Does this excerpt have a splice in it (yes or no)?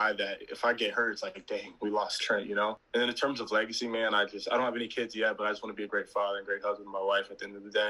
yes